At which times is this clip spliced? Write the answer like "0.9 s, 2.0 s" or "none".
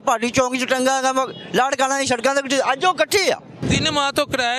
3.6 s